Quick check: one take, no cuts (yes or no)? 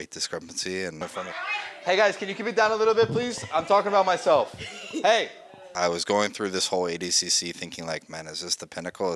no